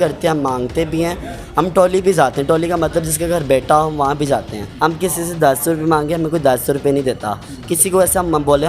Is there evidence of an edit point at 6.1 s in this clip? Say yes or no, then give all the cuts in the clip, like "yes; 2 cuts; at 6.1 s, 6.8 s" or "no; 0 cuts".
no; 1 cut; at 4.6 s